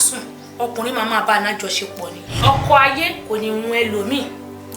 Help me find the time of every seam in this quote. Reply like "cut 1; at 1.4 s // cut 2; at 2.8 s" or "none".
cut 1; at 2.4 s

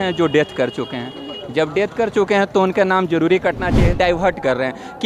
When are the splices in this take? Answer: cut 1; at 4.0 s

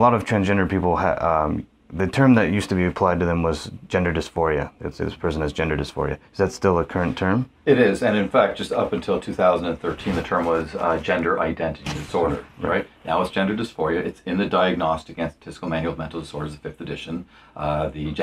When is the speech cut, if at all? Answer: cut 1; at 13.3 s

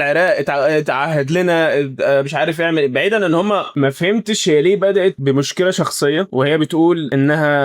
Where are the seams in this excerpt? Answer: cut 1; at 3.7 s

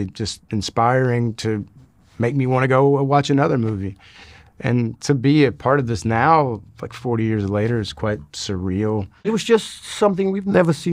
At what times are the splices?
cut 1; at 9.3 s

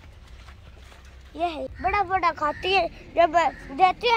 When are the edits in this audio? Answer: cut 1; at 1.7 s

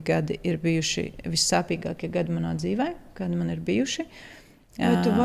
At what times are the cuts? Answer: none

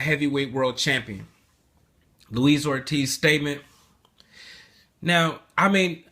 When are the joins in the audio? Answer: cut 1; at 1.6 s

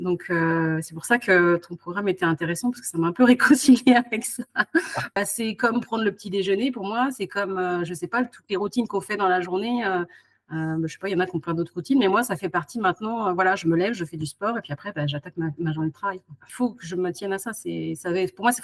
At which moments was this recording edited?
cut 1; at 5.1 s // cut 2; at 16.5 s

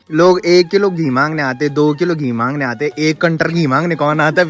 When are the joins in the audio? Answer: none

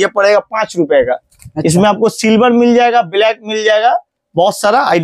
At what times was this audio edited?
none

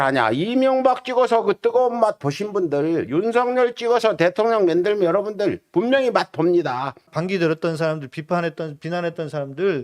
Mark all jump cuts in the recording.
cut 1; at 7.0 s

